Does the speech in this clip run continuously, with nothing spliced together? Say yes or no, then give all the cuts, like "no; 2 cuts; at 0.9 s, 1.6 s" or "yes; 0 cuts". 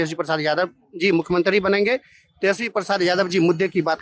yes; 0 cuts